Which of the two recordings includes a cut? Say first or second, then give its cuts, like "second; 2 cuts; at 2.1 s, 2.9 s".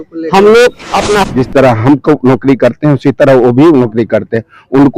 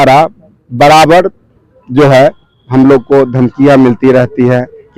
first; 1 cut; at 1.2 s